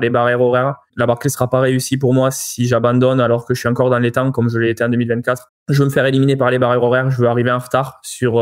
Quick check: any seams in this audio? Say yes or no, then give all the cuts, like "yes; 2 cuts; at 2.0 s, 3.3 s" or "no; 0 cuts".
yes; 2 cuts; at 0.9 s, 5.5 s